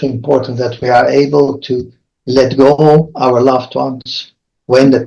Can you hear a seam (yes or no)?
no